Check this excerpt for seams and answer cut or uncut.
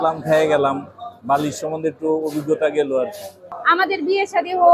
cut